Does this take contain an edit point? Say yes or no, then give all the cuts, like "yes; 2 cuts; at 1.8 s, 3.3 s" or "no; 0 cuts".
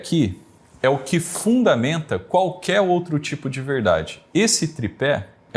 no; 0 cuts